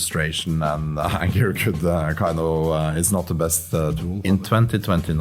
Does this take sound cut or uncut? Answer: cut